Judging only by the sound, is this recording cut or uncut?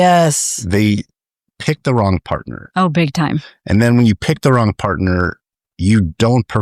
uncut